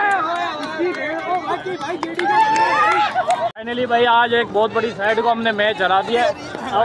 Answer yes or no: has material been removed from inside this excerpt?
no